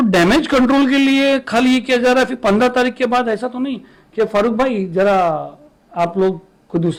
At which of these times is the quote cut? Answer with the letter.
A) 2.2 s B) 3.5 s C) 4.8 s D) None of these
D